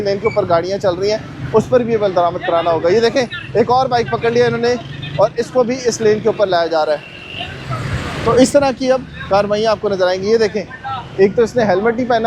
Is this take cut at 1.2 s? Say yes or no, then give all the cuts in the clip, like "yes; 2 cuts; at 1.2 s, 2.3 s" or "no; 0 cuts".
no; 0 cuts